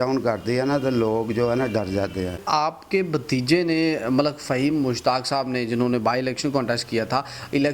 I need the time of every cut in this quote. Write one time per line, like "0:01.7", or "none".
0:02.4